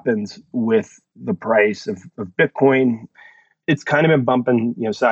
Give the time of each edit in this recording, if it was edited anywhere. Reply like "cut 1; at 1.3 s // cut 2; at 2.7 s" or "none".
cut 1; at 3.2 s